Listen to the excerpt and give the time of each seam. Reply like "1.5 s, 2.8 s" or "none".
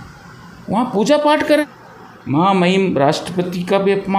1.6 s

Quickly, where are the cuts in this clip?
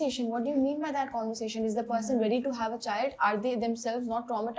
none

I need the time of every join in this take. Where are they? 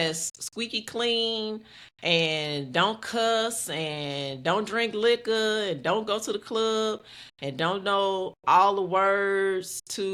none

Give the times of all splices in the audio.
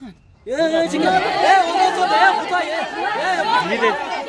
none

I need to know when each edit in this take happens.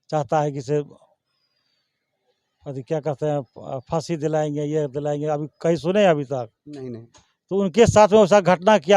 none

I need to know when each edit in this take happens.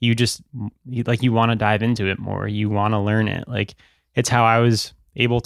none

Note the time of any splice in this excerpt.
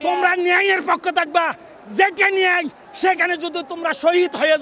none

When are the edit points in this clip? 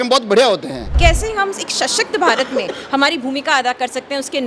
0.9 s

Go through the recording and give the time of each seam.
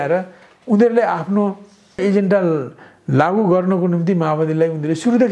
2.0 s

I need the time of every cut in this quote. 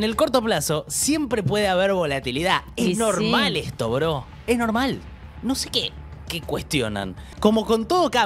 7.2 s

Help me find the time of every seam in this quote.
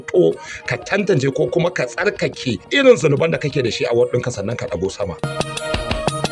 5.2 s

